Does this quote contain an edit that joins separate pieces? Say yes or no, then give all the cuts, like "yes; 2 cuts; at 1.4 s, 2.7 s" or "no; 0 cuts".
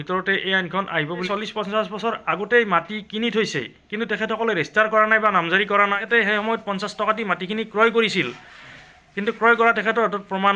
yes; 2 cuts; at 1.3 s, 6.0 s